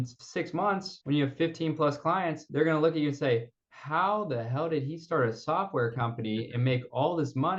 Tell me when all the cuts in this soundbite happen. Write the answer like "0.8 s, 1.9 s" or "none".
0.9 s, 2.4 s